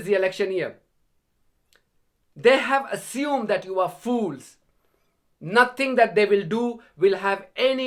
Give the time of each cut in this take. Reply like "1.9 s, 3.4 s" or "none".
none